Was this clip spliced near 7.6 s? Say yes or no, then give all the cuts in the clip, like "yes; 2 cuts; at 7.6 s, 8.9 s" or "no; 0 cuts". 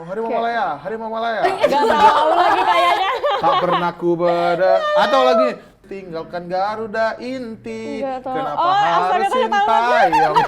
no; 1 cut; at 5.8 s